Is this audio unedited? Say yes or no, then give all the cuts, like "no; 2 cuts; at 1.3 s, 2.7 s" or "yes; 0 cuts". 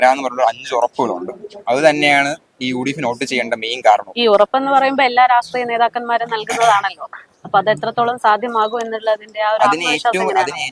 yes; 0 cuts